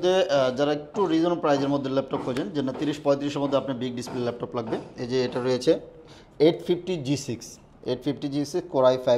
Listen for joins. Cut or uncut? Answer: uncut